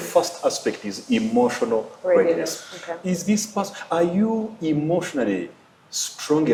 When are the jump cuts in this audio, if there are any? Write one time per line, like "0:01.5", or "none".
none